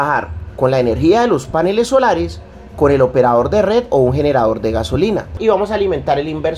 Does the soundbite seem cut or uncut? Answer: cut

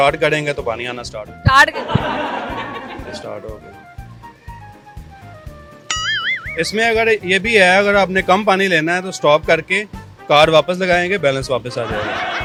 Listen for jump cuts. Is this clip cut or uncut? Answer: uncut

